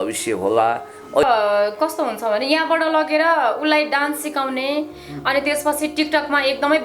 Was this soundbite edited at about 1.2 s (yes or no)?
yes